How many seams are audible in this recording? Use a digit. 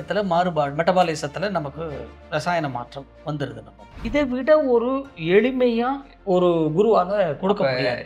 1